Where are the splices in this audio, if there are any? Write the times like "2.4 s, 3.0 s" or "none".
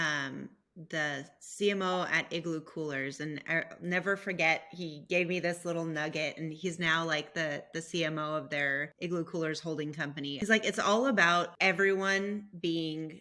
8.9 s, 10.4 s, 11.5 s